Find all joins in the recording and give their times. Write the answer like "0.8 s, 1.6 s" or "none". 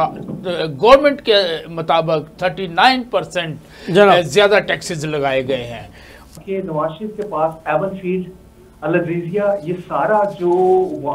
6.3 s